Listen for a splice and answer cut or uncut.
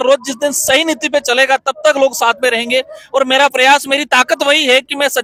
uncut